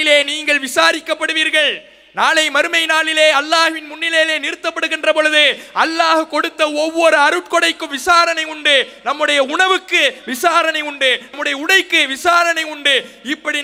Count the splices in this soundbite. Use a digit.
0